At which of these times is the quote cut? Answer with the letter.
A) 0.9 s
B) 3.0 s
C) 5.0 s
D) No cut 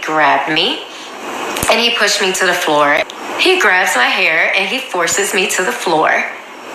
B